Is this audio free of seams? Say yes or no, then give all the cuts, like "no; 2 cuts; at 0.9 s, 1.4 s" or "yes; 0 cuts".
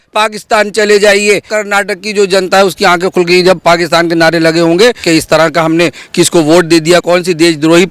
no; 3 cuts; at 1.5 s, 5.0 s, 7.0 s